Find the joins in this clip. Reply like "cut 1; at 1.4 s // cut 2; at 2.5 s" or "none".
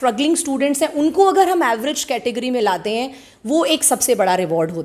none